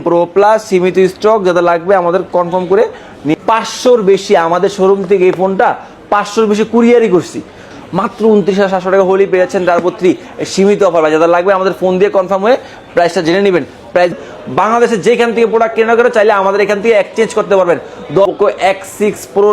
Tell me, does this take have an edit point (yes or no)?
yes